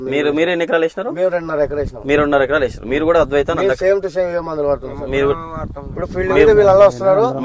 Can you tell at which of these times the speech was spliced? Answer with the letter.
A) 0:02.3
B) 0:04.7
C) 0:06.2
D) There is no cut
D